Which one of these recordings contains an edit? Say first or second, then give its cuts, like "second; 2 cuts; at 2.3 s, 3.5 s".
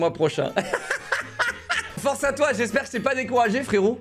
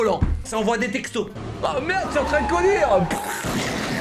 second; 1 cut; at 1.4 s